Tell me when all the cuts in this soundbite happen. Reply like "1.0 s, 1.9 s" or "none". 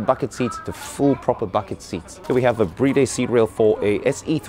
2.1 s